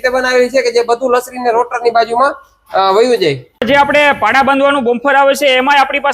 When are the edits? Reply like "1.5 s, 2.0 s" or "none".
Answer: 3.5 s